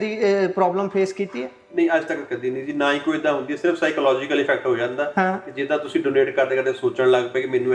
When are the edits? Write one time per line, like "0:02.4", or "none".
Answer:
none